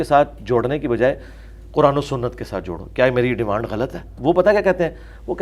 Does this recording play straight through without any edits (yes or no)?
no